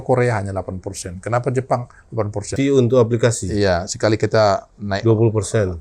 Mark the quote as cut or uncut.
cut